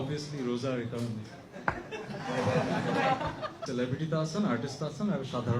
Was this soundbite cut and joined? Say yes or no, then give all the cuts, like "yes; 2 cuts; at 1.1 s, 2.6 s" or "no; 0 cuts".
no; 0 cuts